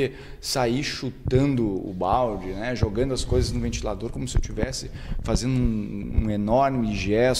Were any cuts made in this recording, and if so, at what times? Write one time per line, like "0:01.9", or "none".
none